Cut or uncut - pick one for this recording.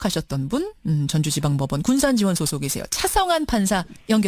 cut